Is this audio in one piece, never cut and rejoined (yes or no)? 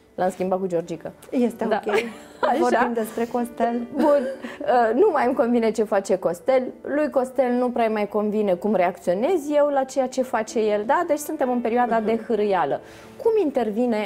yes